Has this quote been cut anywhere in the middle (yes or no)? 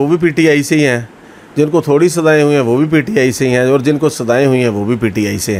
no